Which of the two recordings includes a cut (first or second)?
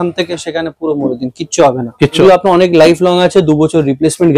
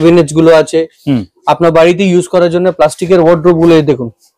first